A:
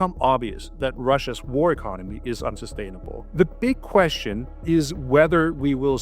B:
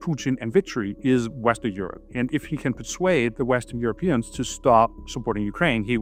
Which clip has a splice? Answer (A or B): A